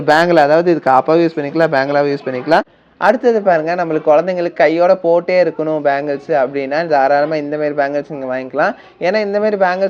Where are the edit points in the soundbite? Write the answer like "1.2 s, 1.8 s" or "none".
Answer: 2.8 s